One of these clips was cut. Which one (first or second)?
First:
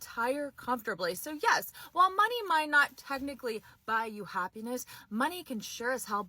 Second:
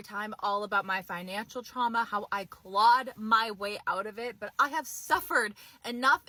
first